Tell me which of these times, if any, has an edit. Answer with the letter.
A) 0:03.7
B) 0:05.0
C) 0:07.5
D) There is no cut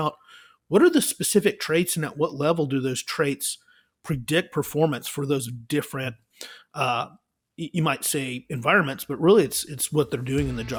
D